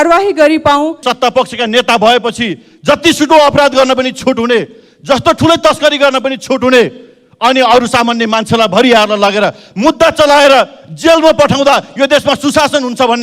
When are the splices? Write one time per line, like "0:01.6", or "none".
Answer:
0:01.0